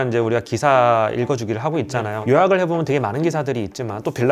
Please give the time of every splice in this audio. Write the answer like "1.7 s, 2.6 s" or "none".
2.2 s